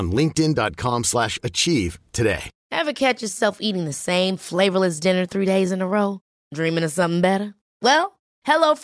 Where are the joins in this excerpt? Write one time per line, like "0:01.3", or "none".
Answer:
0:02.5